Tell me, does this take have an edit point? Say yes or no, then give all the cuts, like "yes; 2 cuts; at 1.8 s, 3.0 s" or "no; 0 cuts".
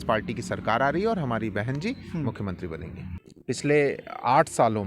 yes; 1 cut; at 3.0 s